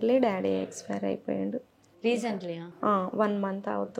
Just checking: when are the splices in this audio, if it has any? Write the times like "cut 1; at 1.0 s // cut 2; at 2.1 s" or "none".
none